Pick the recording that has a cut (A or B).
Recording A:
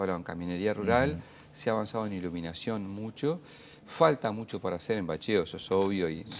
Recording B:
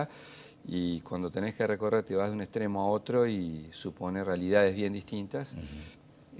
B